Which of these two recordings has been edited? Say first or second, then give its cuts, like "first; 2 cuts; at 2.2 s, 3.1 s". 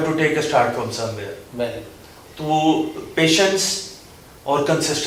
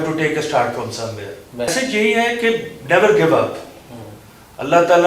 second; 1 cut; at 1.7 s